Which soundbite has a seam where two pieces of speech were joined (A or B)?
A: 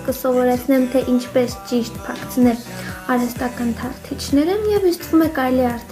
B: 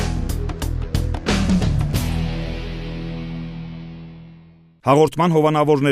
B